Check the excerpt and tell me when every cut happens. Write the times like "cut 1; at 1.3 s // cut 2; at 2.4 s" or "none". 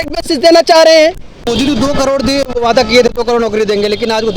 cut 1; at 1.5 s